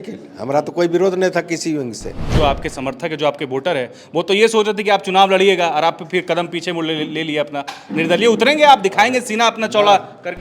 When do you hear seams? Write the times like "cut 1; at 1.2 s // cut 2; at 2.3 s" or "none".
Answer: cut 1; at 2.2 s